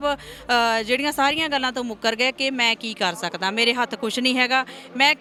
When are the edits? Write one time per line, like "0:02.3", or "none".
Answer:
none